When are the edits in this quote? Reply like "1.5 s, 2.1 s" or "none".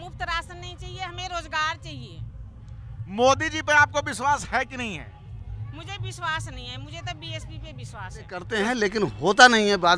8.5 s